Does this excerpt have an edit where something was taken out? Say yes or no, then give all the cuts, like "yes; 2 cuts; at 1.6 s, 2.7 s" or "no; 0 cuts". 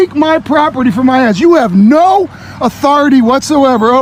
no; 0 cuts